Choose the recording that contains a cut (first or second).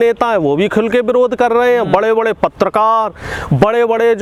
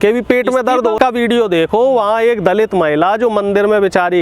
second